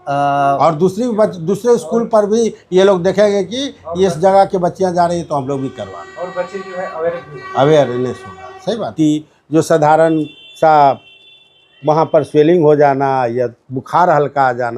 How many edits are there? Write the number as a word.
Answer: one